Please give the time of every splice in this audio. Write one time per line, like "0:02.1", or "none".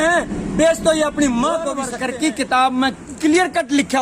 0:01.9